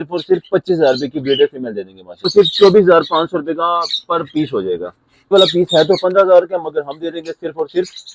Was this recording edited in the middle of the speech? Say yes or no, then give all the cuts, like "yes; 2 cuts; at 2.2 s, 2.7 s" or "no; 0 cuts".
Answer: yes; 2 cuts; at 2.3 s, 5.3 s